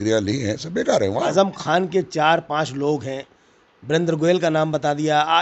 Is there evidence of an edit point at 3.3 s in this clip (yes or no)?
no